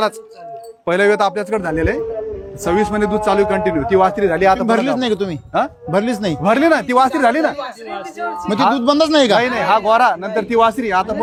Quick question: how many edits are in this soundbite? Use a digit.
0